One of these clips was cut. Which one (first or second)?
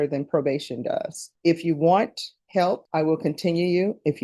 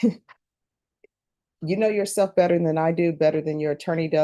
first